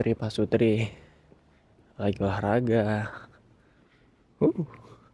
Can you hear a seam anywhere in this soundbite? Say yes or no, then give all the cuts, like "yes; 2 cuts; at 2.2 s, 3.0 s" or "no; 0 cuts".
no; 0 cuts